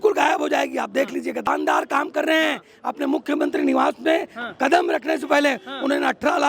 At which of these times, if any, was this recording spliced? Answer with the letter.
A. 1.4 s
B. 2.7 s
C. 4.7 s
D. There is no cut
A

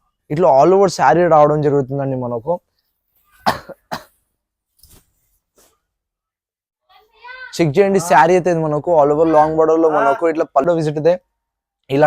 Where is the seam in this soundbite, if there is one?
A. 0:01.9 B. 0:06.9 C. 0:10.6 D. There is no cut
C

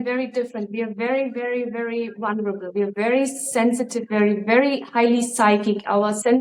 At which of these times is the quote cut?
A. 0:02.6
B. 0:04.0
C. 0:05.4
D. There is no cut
D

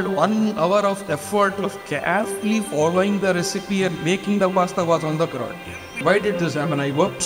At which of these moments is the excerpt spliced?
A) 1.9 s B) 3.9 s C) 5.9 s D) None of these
C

